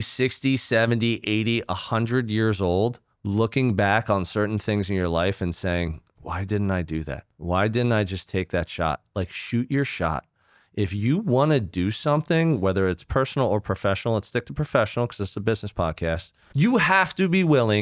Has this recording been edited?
yes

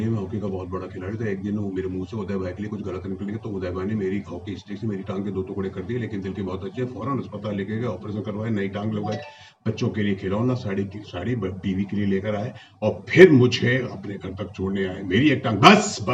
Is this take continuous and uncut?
yes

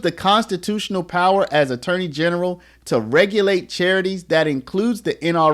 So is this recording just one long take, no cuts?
yes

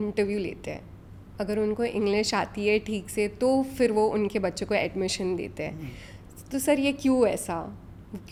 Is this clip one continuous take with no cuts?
yes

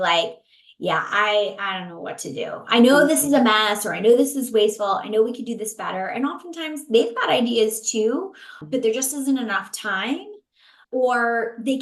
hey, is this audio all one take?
no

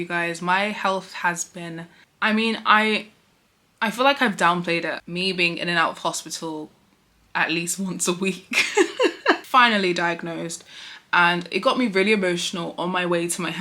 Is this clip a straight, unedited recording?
no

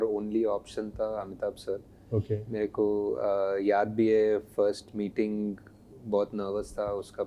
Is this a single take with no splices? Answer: yes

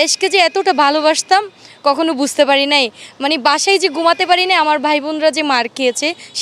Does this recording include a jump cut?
no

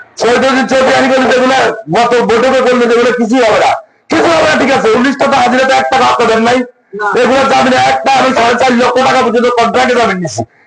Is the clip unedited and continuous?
yes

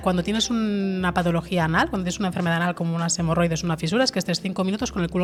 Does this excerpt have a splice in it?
no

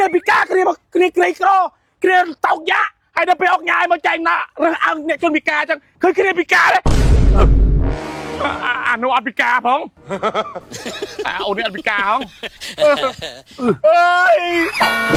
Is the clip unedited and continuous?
yes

